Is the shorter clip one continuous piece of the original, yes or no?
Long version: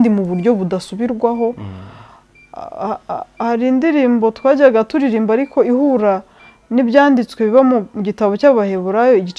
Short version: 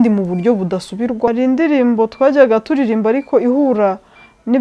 no